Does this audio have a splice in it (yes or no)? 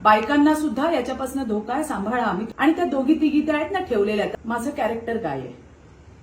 yes